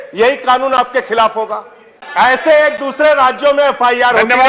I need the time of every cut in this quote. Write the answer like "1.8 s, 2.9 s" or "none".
2.0 s